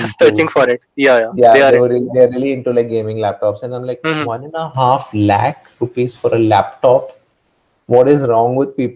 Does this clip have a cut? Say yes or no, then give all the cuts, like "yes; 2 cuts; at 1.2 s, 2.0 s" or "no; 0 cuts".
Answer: no; 0 cuts